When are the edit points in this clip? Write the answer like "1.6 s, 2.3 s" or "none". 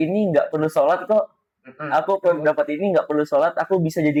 none